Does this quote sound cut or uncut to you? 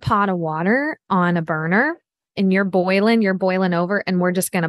uncut